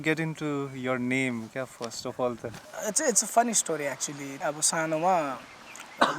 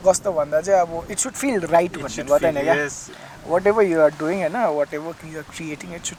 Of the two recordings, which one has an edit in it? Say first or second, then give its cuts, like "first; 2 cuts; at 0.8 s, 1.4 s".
first; 2 cuts; at 2.6 s, 4.4 s